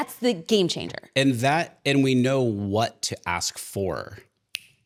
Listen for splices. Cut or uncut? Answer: uncut